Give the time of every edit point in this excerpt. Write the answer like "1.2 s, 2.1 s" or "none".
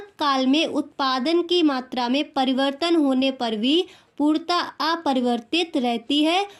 none